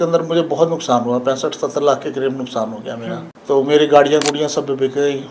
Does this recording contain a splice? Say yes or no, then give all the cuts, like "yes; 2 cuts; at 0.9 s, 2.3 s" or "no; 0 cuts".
yes; 1 cut; at 3.3 s